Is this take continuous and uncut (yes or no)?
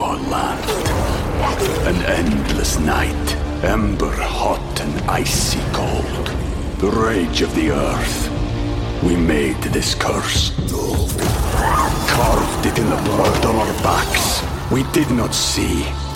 yes